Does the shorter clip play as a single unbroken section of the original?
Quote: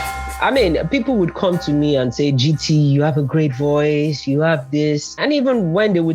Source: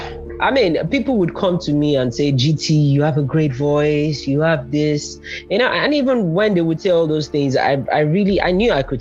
no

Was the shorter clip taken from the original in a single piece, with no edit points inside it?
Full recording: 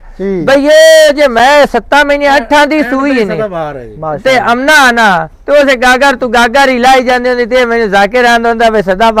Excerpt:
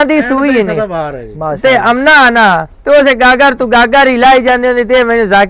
yes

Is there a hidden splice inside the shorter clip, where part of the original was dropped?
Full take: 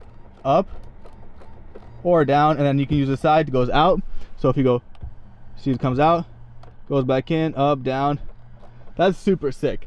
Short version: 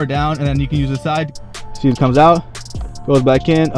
yes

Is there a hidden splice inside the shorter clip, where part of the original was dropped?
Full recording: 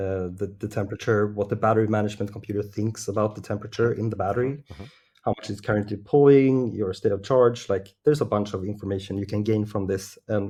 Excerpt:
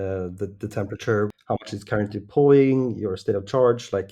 yes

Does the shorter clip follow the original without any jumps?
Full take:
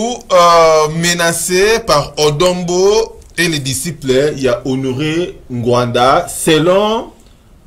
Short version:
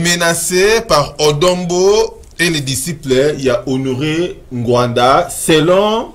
yes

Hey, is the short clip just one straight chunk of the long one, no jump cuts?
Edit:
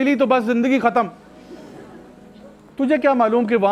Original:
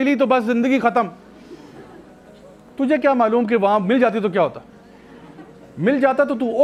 yes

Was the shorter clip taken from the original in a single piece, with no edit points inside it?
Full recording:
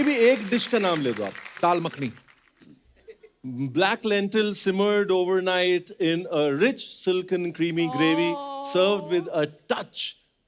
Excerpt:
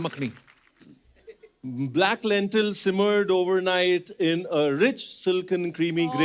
yes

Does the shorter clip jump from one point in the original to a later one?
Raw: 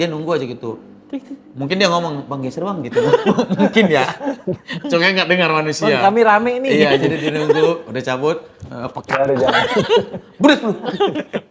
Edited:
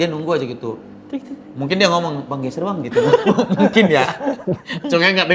no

